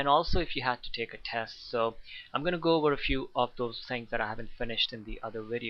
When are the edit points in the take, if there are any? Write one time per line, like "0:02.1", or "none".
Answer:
0:04.5